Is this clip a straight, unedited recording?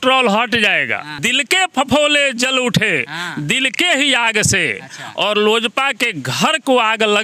no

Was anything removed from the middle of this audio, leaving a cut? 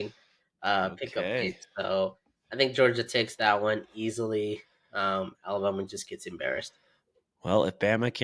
no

